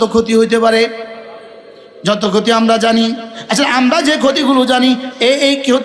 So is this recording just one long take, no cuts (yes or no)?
yes